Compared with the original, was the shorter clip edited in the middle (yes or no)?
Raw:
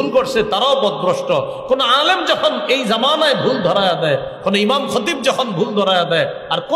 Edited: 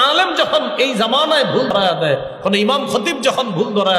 yes